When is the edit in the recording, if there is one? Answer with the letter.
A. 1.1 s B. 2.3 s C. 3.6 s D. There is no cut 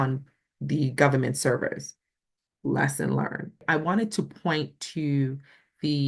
C